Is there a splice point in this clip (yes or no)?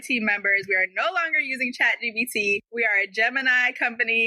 yes